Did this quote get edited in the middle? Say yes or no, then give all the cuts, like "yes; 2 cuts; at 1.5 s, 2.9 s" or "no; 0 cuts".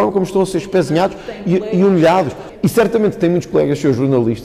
yes; 1 cut; at 2.3 s